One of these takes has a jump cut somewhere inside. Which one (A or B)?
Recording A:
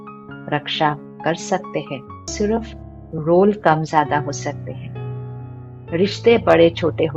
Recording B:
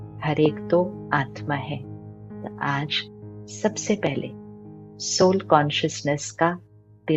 A